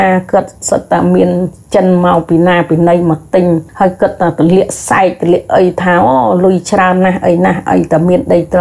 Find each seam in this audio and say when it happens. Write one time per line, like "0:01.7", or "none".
0:03.7

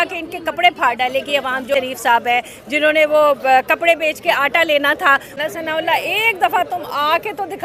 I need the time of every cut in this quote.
0:01.7
0:05.4

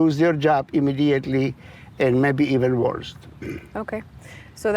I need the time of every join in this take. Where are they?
none

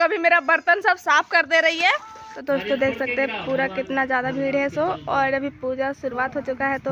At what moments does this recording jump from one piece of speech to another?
0:02.3

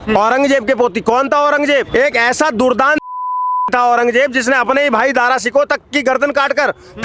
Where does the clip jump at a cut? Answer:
0:01.9

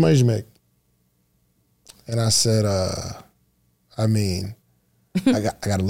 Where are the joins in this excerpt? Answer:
none

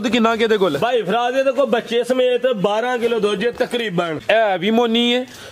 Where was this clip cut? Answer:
0:04.2

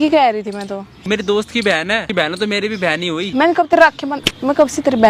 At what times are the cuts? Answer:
0:00.9
0:03.3

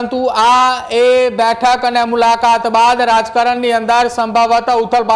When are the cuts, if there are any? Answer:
none

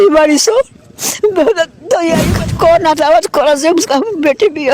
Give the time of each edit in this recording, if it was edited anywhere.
0:02.3

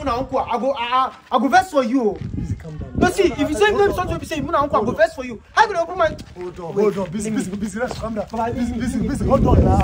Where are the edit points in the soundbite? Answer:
none

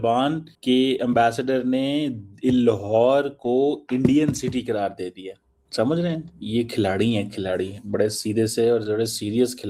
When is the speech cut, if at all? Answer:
none

